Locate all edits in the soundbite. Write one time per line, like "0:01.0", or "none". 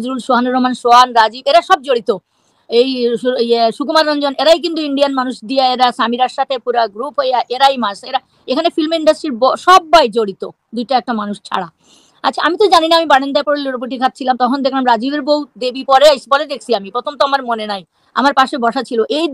none